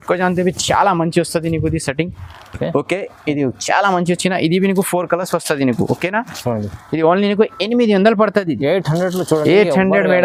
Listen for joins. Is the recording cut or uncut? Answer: uncut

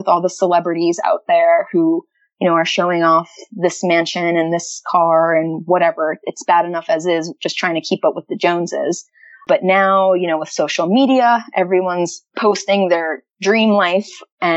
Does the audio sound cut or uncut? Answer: cut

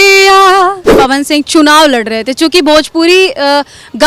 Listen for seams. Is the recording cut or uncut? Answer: cut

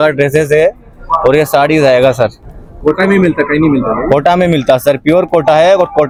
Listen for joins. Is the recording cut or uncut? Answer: uncut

